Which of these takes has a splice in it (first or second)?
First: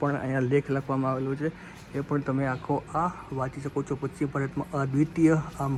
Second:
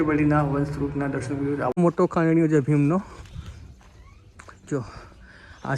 second